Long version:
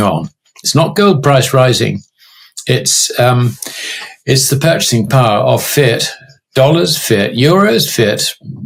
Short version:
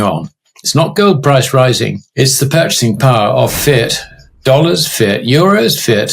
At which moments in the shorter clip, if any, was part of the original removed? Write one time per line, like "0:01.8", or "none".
0:02.0